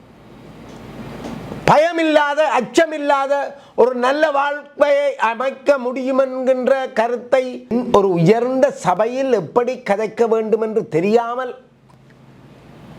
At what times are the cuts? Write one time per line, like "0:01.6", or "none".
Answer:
0:07.7